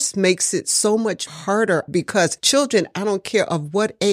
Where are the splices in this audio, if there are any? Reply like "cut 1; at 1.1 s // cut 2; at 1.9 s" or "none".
cut 1; at 2.4 s